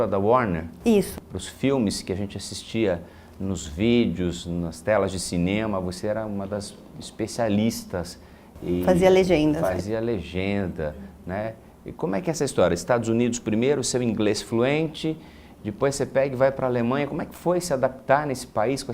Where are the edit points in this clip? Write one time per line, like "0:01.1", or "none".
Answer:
0:04.0